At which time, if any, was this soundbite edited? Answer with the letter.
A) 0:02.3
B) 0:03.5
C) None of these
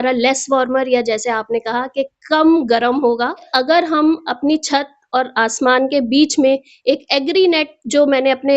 B